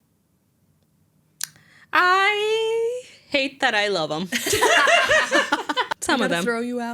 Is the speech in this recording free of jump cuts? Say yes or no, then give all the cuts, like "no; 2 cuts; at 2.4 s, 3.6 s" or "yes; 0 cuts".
no; 1 cut; at 5.9 s